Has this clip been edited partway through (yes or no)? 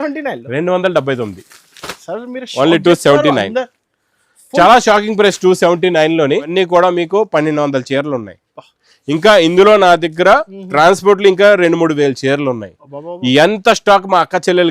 yes